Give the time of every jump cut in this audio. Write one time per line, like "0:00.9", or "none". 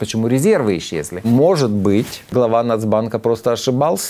0:01.2
0:02.3